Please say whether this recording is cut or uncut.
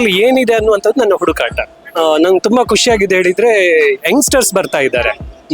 cut